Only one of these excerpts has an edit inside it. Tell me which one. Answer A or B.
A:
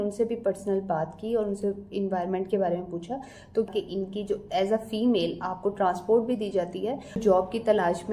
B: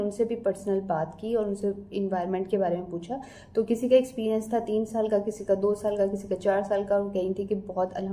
A